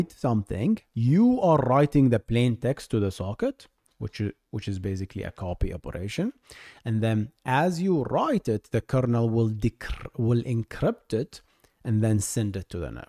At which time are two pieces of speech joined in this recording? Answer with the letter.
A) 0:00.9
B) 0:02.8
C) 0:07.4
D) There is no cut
A